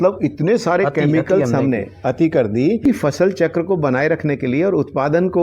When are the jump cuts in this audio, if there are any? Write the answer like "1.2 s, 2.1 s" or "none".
2.9 s